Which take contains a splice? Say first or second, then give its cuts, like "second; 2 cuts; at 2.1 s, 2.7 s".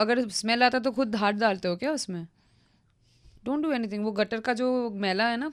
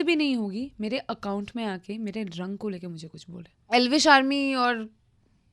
second; 1 cut; at 3.6 s